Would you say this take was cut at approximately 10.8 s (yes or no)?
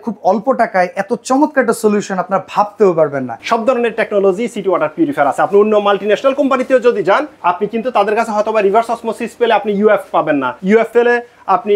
yes